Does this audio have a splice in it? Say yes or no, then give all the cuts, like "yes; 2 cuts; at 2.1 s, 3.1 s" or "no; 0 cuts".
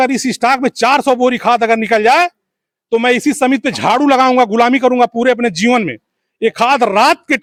no; 0 cuts